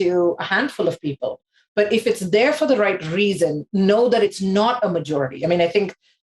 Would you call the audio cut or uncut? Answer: cut